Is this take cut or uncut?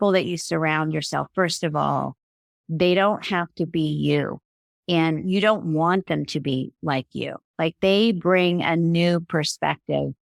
uncut